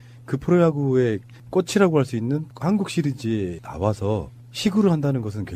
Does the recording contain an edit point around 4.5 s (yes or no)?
yes